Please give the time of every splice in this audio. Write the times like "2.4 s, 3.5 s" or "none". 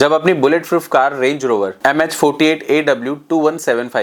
none